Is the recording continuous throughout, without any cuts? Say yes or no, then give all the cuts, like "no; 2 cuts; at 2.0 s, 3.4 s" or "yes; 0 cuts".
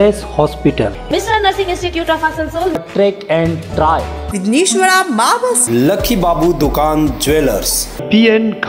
yes; 0 cuts